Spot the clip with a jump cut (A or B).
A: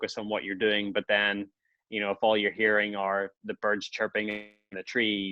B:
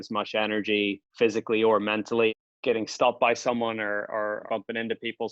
B